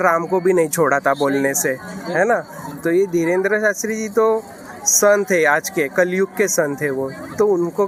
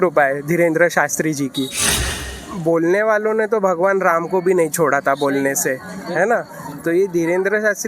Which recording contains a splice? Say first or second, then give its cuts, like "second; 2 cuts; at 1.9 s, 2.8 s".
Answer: second; 1 cut; at 2.0 s